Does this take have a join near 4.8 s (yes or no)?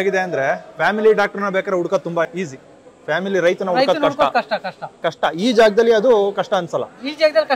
no